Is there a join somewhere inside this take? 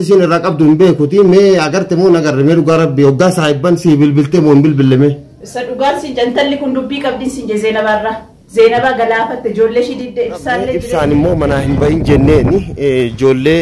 yes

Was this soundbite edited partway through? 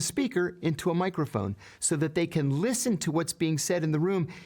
no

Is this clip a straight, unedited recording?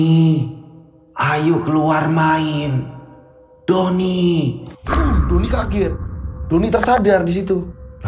yes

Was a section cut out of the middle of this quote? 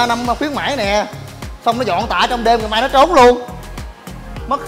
no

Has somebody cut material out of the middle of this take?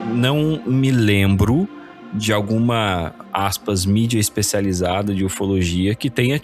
no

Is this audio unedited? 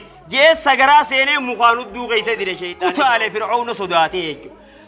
no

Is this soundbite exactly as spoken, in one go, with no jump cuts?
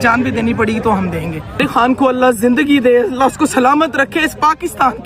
no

